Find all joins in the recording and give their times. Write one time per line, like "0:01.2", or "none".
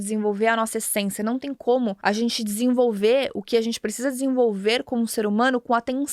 0:02.0